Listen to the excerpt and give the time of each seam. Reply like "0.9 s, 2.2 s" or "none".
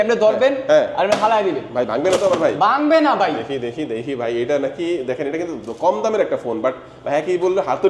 none